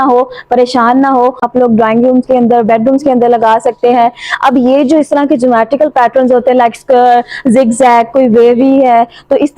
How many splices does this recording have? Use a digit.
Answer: 1